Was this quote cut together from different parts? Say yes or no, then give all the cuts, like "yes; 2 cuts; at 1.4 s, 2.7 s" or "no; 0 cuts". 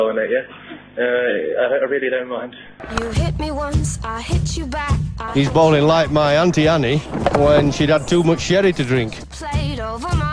no; 0 cuts